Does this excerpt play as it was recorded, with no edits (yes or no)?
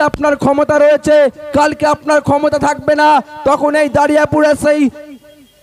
yes